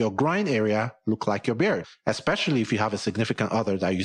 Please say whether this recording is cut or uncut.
cut